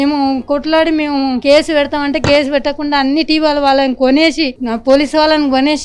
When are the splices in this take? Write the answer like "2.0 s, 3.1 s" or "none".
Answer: none